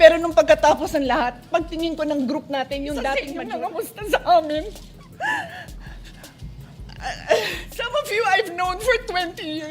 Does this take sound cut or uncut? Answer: cut